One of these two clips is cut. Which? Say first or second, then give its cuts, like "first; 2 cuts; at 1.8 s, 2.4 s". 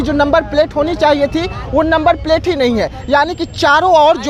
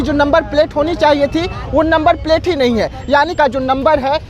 second; 1 cut; at 3.3 s